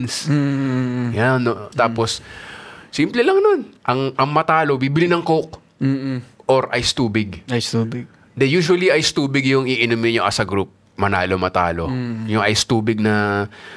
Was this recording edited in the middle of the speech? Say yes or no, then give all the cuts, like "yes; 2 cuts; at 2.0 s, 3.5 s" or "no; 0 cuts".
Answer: yes; 1 cut; at 1.7 s